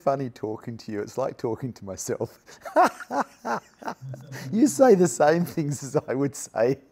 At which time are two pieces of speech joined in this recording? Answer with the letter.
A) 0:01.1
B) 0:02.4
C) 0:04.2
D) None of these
D